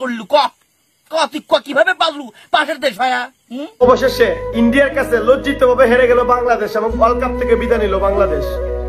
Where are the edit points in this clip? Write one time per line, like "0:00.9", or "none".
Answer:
0:03.8